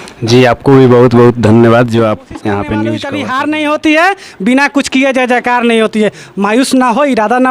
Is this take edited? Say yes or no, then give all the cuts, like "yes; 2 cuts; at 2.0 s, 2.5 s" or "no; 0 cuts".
yes; 1 cut; at 3.0 s